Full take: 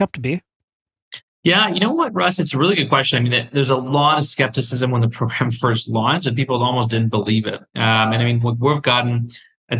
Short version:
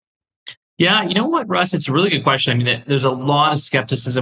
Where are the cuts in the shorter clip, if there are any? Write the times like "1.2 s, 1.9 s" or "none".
none